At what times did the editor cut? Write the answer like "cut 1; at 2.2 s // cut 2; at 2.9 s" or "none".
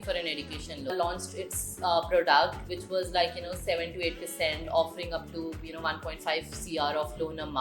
cut 1; at 0.9 s // cut 2; at 4.6 s